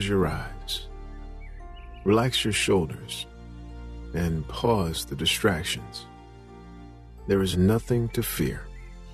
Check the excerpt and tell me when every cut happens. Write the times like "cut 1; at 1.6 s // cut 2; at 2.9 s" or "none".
cut 1; at 5.8 s // cut 2; at 7.2 s

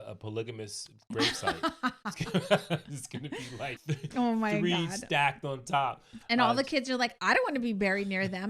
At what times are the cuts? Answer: cut 1; at 3.7 s

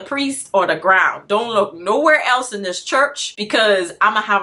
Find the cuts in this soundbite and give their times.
cut 1; at 3.3 s

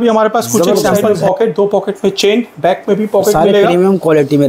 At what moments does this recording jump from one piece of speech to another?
cut 1; at 1.1 s

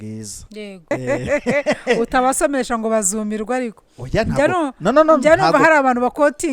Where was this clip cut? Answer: cut 1; at 0.9 s

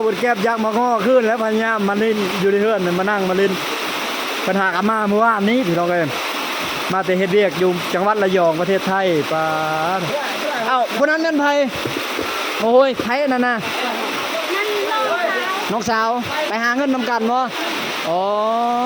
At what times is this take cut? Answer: none

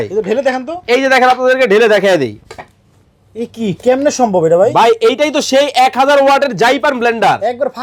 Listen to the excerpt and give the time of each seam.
none

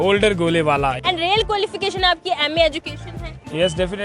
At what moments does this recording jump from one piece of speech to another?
cut 1; at 1.0 s

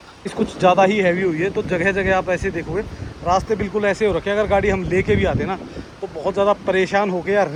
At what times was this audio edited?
none

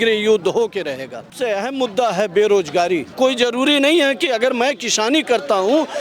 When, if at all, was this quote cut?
cut 1; at 1.3 s // cut 2; at 3.1 s

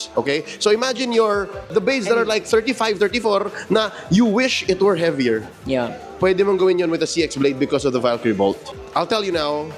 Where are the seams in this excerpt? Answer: cut 1; at 1.7 s // cut 2; at 8.7 s

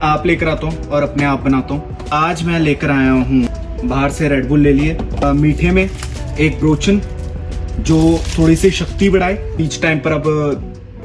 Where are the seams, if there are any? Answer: none

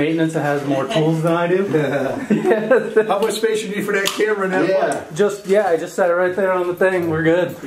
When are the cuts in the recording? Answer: none

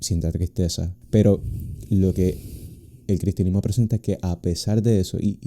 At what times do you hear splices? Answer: cut 1; at 0.9 s

